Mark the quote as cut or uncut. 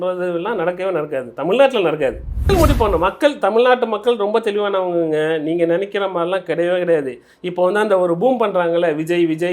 cut